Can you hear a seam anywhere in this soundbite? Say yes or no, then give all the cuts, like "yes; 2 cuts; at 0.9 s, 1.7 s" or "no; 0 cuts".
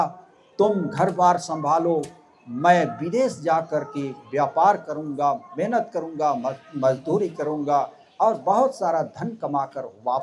no; 0 cuts